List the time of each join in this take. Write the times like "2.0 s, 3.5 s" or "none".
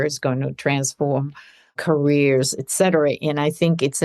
1.8 s